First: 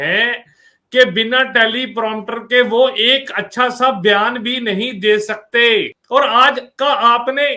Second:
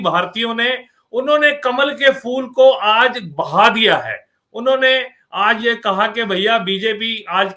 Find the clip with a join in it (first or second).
first